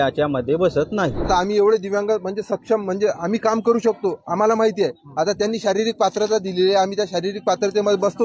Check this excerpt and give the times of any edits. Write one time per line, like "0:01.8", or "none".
0:01.2